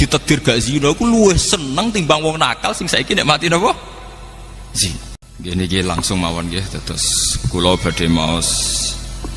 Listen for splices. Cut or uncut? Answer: cut